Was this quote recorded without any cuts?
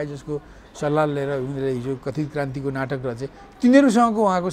yes; 0 cuts

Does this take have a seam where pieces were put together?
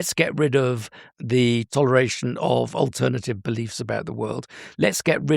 yes; 1 cut; at 1.2 s

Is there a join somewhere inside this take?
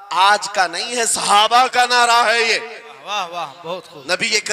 no; 0 cuts

